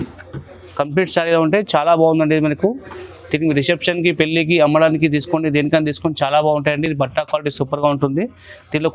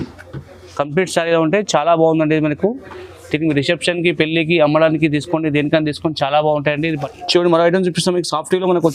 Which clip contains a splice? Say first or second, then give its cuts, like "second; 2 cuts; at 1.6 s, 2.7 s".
second; 1 cut; at 6.8 s